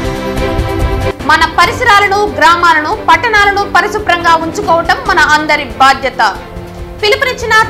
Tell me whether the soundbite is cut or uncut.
cut